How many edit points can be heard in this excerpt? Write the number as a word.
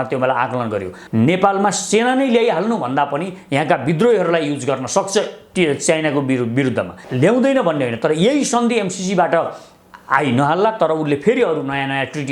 two